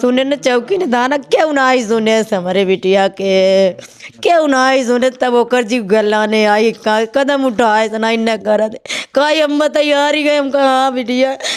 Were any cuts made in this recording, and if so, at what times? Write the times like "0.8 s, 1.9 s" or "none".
none